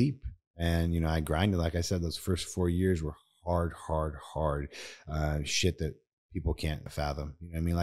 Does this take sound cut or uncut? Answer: cut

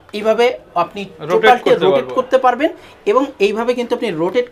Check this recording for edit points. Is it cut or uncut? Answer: uncut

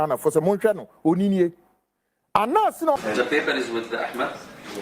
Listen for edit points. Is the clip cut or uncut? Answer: cut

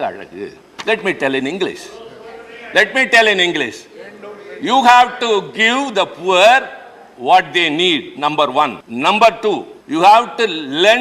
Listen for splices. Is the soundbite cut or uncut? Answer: cut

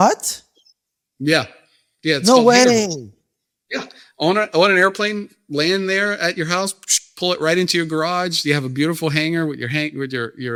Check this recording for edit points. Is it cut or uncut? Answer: uncut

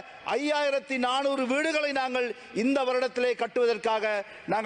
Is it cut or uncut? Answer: uncut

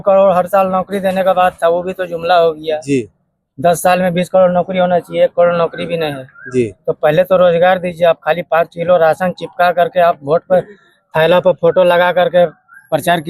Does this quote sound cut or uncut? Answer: uncut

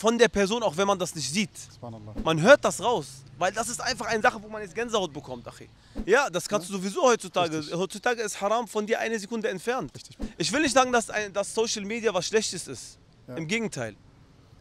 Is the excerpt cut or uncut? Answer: cut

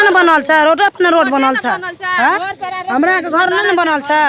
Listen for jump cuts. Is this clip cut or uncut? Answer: uncut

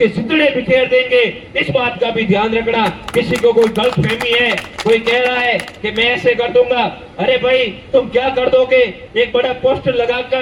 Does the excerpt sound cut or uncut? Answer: uncut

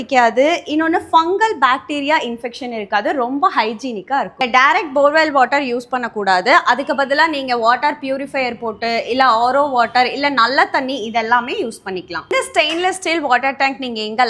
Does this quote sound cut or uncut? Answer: uncut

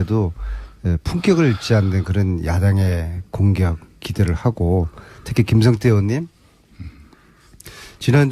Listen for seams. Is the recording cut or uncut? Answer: cut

